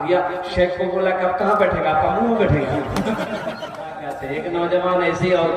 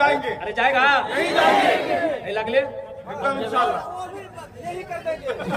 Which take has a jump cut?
first; 1 cut; at 4.1 s

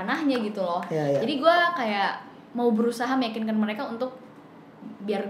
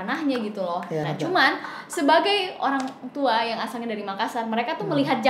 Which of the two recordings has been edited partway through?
second; 1 cut; at 1.0 s

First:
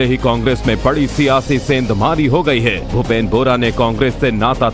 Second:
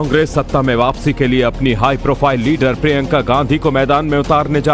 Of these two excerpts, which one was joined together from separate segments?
second; 1 cut; at 3.4 s

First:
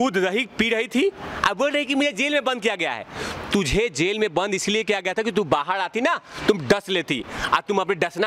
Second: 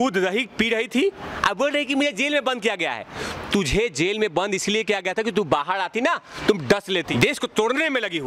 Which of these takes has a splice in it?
second; 1 cut; at 7.1 s

